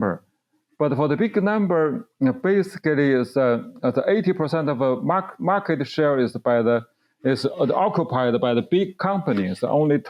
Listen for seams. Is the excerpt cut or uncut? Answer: uncut